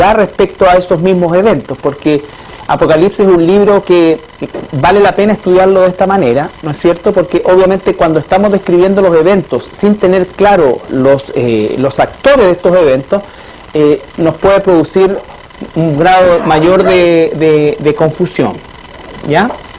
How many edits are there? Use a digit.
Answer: 1